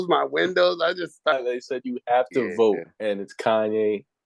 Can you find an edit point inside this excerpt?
yes; 1 cut; at 1.3 s

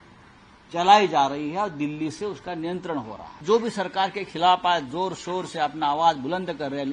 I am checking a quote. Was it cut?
yes; 1 cut; at 3.4 s

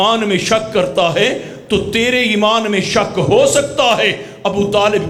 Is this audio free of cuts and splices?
yes; 0 cuts

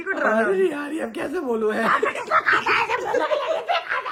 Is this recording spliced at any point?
no; 0 cuts

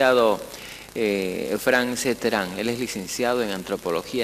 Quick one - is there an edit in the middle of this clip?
yes; 1 cut; at 1.6 s

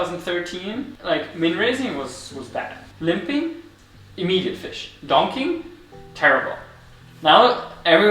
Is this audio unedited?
no; 2 cuts; at 0.9 s, 2.8 s

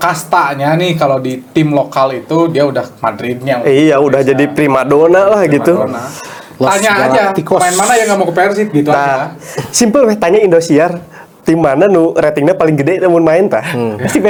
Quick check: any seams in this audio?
no; 0 cuts

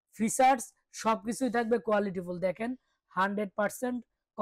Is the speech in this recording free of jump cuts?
yes; 0 cuts

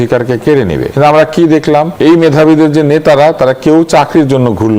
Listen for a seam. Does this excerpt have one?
yes; 2 cuts; at 0.9 s, 1.9 s

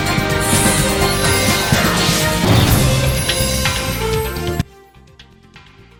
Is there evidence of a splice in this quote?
no; 0 cuts

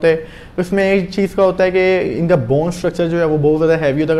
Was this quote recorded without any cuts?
yes; 0 cuts

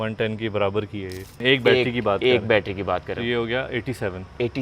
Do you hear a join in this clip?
yes; 1 cut; at 1.4 s

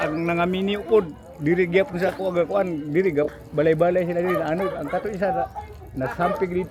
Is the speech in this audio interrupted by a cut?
no; 0 cuts

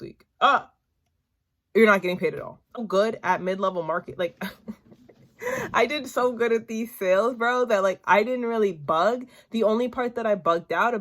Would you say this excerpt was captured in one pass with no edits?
no; 1 cut; at 2.7 s

